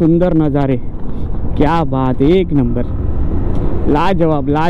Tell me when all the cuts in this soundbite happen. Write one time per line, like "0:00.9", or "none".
none